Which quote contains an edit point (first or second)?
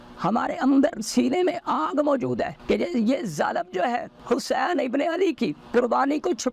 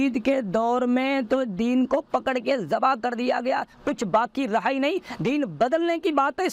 first